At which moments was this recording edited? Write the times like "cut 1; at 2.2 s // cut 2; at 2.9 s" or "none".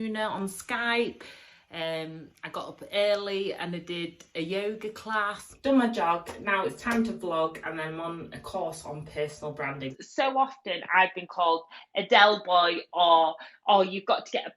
cut 1; at 5.4 s // cut 2; at 10.0 s